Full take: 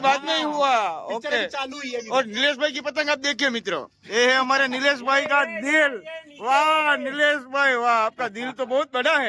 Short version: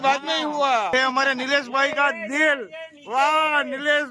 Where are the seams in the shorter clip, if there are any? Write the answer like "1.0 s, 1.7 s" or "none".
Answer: 0.9 s